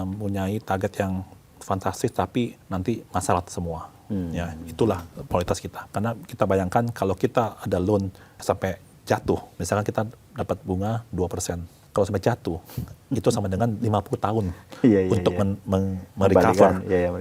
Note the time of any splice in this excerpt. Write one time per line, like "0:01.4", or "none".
0:02.6
0:05.8
0:08.2
0:09.5
0:11.7